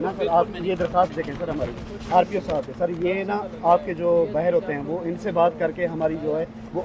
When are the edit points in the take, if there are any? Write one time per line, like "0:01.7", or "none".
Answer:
none

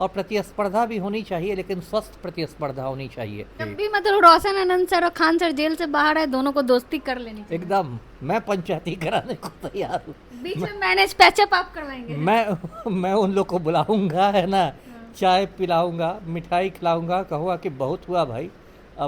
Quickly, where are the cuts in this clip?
0:03.6

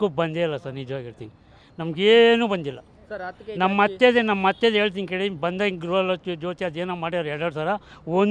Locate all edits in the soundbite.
none

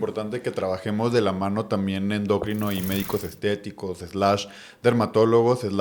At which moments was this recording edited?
none

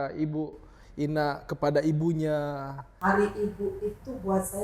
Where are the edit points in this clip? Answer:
0:02.8

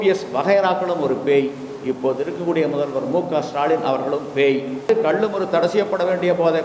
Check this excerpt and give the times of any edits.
0:04.9

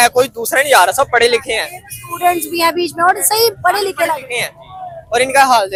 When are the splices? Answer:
none

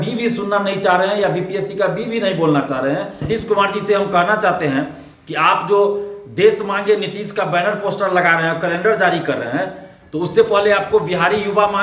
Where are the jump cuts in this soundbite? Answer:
0:03.2

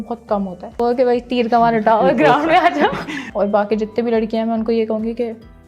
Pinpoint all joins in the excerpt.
0:00.8
0:03.3

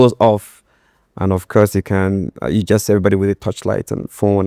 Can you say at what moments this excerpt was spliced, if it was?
none

